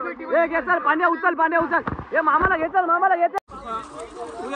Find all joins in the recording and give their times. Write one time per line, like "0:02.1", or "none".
0:03.4